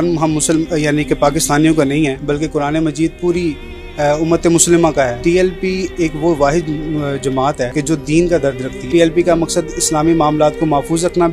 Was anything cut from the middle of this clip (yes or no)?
yes